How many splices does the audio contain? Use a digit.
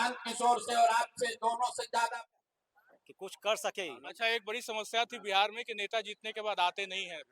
1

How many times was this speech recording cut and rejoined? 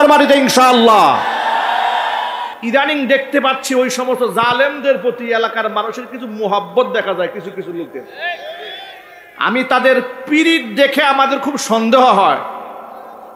1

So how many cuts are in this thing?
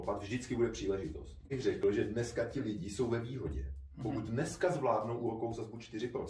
1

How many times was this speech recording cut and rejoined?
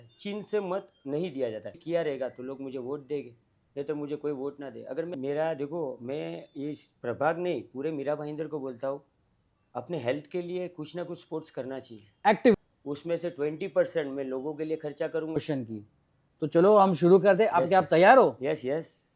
4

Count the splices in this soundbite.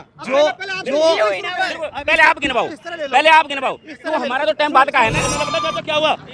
1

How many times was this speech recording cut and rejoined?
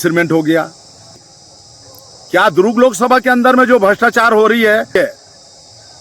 2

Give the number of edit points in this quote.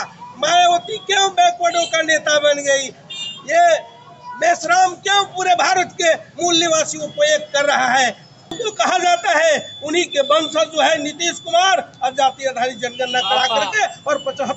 1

